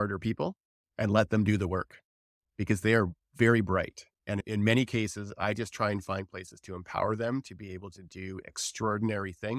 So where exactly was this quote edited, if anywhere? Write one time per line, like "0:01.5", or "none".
0:04.4